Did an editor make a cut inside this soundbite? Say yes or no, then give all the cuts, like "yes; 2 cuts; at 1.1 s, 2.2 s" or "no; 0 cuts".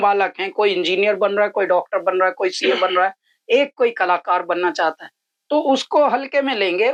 no; 0 cuts